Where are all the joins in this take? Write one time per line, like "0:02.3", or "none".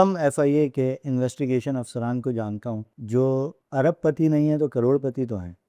0:02.9
0:03.6